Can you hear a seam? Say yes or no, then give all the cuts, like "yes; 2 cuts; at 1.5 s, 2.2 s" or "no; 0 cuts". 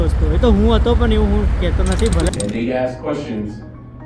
yes; 1 cut; at 2.3 s